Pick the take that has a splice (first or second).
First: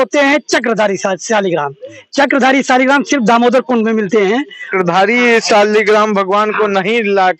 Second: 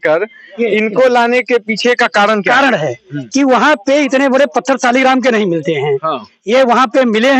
first